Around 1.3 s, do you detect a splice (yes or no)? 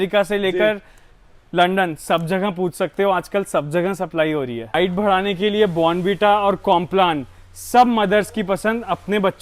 no